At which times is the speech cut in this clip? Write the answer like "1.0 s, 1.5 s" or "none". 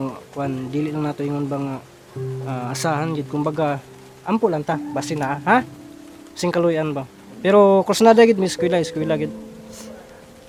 none